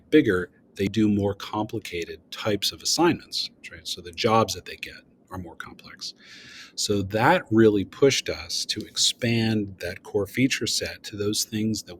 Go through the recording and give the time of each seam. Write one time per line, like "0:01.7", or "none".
0:00.9